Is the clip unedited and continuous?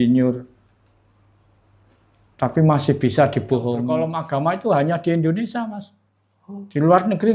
no; 1 cut; at 3.9 s

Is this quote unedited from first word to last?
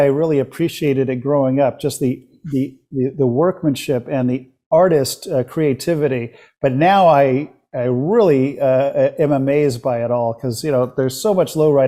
yes; 0 cuts

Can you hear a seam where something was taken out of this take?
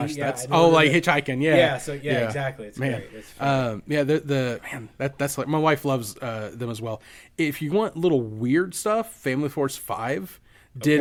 no; 0 cuts

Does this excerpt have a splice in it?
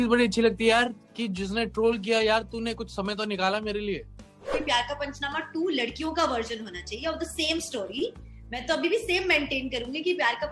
yes; 1 cut; at 4.6 s

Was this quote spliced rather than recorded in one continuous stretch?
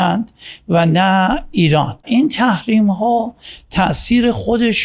yes; 1 cut; at 2.0 s

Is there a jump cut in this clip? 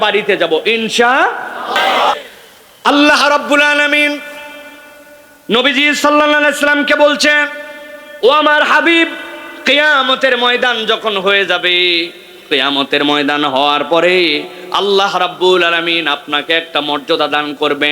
yes; 1 cut; at 2.1 s

